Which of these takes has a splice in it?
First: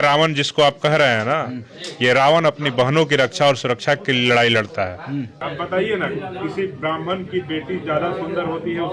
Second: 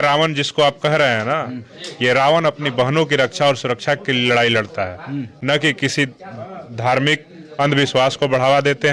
first; 1 cut; at 5.3 s

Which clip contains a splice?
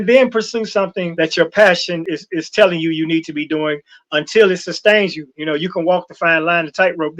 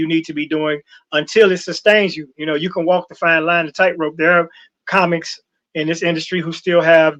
first; 2 cuts; at 1.0 s, 2.1 s

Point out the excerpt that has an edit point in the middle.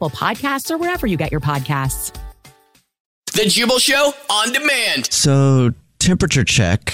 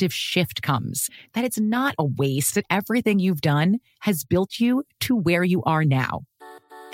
first; 2 cuts; at 3.2 s, 5.3 s

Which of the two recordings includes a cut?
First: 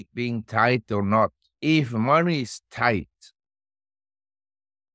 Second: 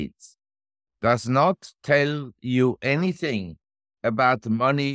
first; 1 cut; at 1.5 s

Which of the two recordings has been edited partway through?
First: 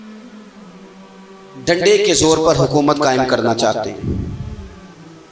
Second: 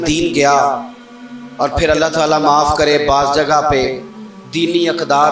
first; 1 cut; at 1.6 s

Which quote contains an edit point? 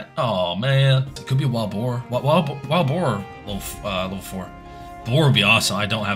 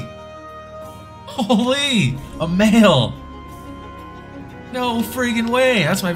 first; 1 cut; at 1.2 s

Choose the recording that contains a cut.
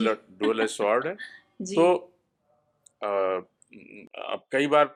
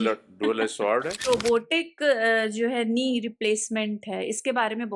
second; 1 cut; at 1.2 s

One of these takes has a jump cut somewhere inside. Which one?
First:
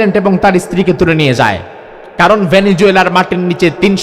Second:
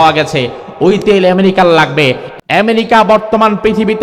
second; 1 cut; at 2.3 s

